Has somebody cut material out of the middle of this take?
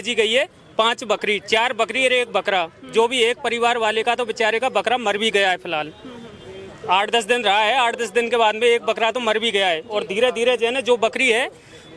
no; 0 cuts

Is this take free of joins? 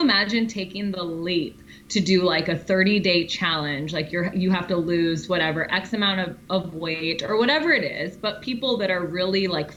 yes; 0 cuts

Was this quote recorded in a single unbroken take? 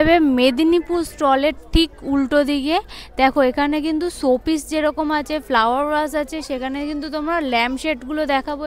yes; 0 cuts

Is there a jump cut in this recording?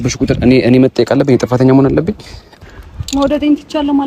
yes; 1 cut; at 2.6 s

